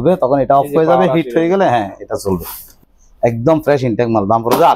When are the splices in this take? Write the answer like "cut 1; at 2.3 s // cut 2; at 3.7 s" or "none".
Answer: cut 1; at 2.8 s